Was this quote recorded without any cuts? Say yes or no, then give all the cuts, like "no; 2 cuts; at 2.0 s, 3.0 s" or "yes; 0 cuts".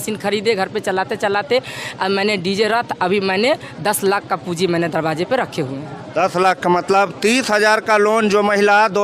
yes; 0 cuts